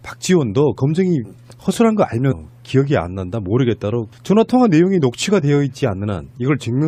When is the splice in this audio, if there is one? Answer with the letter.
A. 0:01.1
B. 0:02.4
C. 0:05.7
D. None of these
D